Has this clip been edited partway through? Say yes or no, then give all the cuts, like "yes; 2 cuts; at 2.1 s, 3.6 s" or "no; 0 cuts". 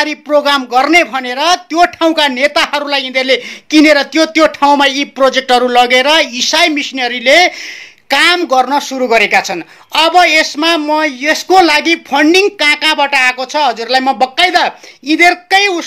no; 0 cuts